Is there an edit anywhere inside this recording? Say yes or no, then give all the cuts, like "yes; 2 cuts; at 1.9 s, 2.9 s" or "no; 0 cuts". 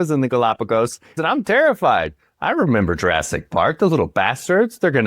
yes; 1 cut; at 1.2 s